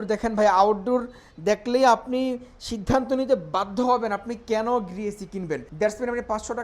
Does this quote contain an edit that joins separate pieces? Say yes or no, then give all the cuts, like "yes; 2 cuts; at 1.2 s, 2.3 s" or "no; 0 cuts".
yes; 1 cut; at 5.7 s